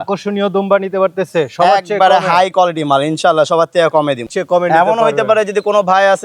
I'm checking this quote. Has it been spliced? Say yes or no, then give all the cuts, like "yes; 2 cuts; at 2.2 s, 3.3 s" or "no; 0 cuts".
yes; 1 cut; at 4.3 s